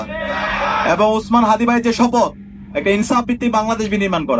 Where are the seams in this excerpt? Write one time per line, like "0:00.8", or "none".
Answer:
none